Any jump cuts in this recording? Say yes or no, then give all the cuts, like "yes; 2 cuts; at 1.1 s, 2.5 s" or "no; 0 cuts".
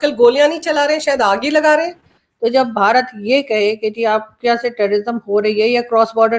yes; 1 cut; at 2.2 s